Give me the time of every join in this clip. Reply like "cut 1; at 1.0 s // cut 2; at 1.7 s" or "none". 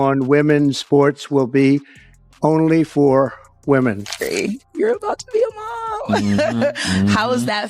cut 1; at 4.2 s